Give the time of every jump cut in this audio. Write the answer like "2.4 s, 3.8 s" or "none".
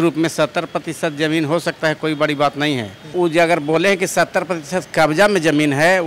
3.1 s